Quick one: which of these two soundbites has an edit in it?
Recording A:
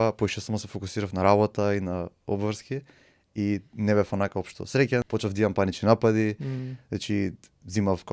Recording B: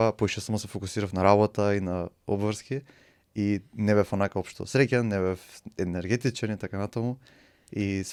A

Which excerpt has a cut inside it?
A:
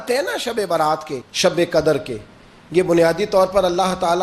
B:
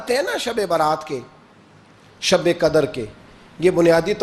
A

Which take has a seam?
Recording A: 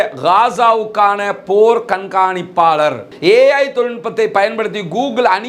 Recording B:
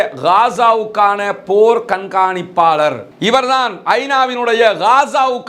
A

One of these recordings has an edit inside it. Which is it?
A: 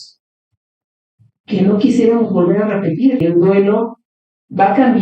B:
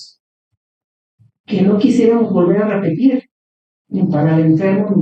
A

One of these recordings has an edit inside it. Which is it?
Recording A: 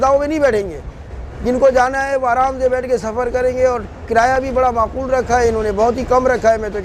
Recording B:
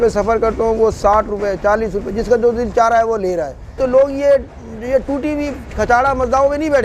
B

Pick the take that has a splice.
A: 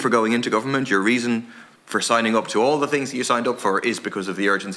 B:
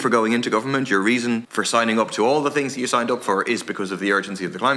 B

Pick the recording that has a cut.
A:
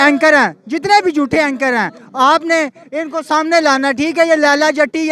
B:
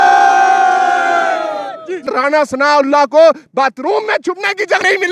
B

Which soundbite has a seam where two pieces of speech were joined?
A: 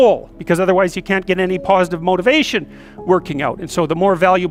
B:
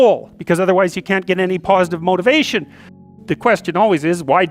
B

